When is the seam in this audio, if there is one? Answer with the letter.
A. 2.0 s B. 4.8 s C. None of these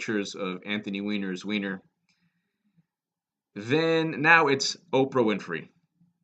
B